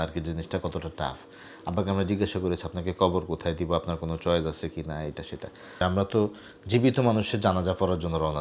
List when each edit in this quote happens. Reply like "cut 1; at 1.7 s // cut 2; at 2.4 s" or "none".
cut 1; at 5.7 s